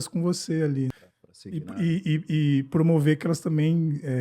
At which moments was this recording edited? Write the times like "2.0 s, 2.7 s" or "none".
1.0 s